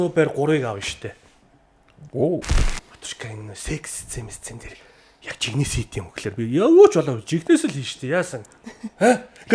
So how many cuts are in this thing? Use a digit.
1